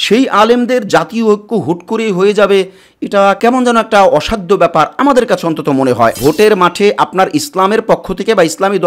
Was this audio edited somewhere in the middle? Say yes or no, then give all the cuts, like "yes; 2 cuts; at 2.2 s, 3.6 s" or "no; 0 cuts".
yes; 1 cut; at 6.2 s